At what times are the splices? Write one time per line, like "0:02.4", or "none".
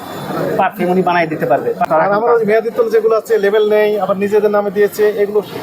0:01.8